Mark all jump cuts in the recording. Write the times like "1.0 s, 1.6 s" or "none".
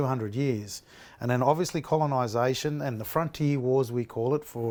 none